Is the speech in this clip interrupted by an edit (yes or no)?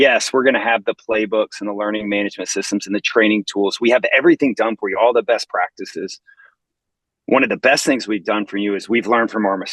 no